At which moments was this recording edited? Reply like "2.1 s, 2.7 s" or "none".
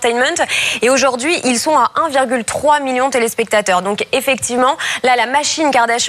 2.8 s